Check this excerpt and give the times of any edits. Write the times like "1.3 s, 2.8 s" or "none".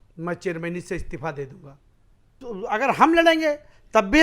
2.3 s